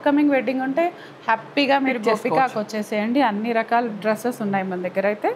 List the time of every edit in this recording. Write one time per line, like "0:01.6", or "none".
none